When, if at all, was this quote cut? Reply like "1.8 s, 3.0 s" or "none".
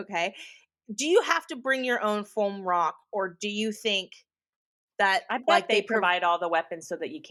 none